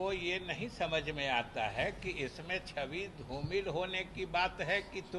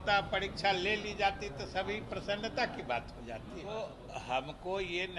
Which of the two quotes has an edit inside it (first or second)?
second